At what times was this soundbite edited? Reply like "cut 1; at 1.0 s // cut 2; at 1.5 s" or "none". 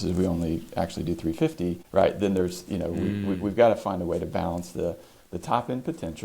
cut 1; at 1.8 s